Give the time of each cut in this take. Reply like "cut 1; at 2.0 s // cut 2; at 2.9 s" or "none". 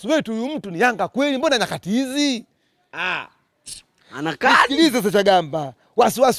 none